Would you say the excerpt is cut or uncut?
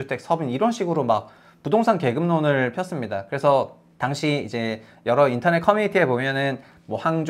cut